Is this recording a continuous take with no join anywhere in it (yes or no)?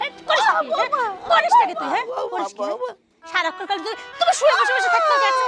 yes